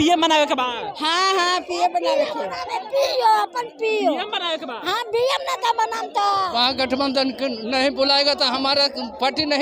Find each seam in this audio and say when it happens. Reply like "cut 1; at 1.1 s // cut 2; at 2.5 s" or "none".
cut 1; at 6.5 s